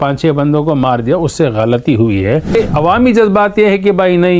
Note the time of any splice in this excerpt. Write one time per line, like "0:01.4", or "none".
0:02.5